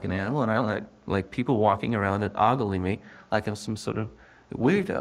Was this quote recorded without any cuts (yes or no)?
yes